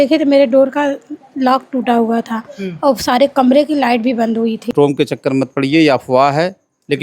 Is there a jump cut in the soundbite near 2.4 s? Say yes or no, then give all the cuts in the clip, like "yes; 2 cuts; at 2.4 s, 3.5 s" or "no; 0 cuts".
no; 1 cut; at 4.7 s